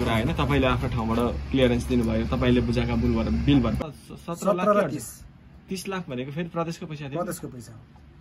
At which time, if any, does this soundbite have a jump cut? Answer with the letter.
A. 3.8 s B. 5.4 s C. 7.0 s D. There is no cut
A